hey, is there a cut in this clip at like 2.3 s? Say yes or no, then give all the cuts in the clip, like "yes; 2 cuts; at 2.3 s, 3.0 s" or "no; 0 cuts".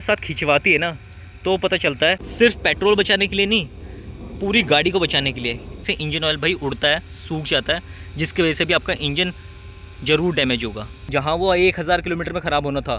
yes; 3 cuts; at 2.3 s, 5.9 s, 11.1 s